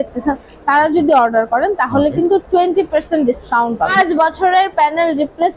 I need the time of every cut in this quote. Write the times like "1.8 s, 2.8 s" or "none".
3.9 s